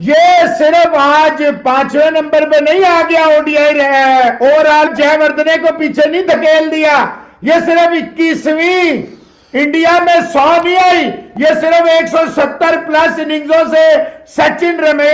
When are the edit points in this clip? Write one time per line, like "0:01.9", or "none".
none